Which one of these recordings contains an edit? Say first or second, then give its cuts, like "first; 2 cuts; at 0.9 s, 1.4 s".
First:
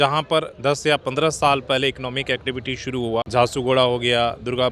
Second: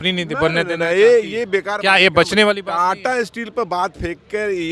first; 1 cut; at 3.3 s